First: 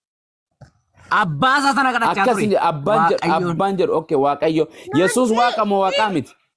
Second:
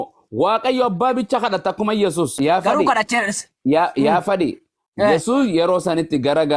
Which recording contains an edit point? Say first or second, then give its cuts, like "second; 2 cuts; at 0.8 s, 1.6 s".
second; 1 cut; at 2.4 s